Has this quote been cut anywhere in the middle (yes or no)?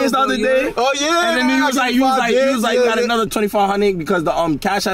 yes